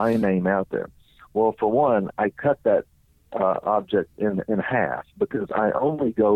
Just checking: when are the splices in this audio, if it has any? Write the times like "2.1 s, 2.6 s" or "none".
none

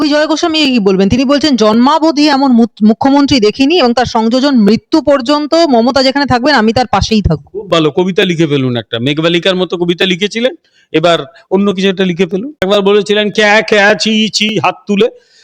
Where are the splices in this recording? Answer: 12.5 s

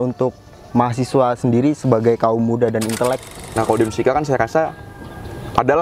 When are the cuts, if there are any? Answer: 3.4 s

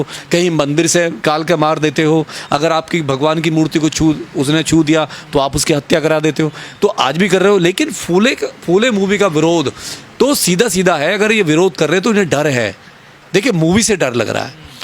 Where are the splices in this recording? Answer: 1.2 s

